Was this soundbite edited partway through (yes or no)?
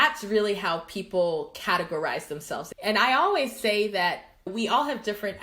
yes